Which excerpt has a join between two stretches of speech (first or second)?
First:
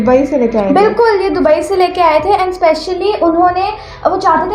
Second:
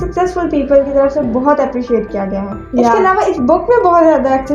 second